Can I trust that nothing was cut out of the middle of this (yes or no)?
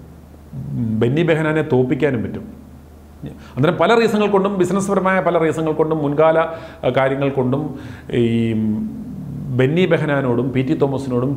yes